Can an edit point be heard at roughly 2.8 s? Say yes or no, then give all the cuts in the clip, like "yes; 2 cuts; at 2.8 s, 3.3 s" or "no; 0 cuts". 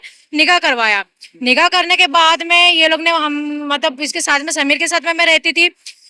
no; 0 cuts